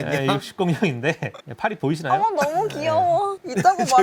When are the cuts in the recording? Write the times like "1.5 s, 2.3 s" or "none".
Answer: none